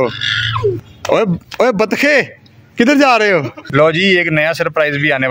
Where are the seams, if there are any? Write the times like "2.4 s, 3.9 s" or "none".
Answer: 0.9 s, 3.6 s